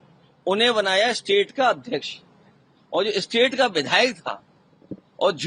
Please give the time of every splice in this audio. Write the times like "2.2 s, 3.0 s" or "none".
none